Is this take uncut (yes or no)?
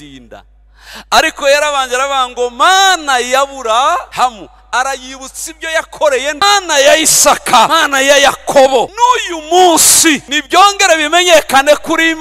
no